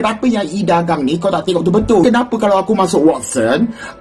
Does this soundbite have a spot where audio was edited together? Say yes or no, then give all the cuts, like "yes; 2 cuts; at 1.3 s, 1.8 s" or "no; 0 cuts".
yes; 1 cut; at 2.0 s